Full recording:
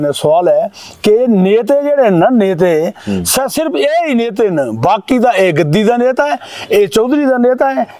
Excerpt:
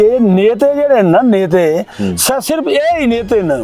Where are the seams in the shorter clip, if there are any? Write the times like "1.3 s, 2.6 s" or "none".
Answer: none